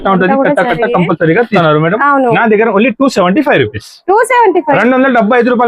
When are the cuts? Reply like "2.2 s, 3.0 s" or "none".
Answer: 1.6 s